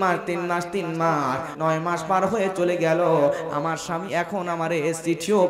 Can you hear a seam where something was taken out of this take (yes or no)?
yes